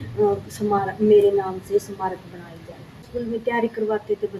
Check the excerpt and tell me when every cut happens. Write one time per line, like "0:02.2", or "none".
0:03.1